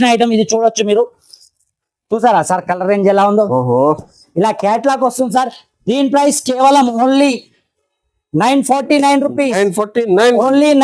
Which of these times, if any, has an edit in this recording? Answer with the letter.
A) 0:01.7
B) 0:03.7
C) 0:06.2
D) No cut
D